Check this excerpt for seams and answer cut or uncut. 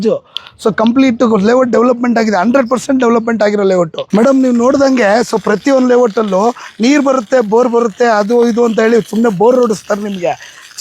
cut